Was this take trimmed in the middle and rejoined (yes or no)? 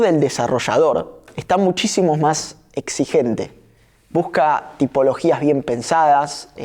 no